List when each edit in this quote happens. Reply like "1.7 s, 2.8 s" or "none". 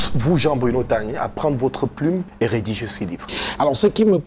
2.3 s, 3.3 s